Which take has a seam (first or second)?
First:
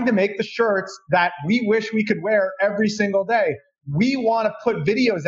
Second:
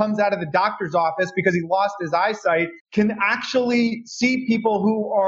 second